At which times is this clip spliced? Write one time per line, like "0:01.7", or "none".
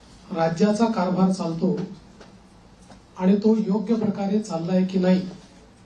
0:04.9